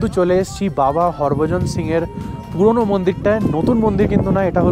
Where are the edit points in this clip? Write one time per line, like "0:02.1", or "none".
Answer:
none